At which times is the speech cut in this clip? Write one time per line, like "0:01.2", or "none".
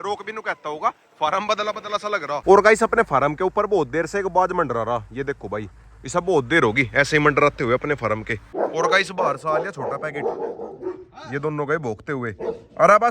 0:02.4
0:08.4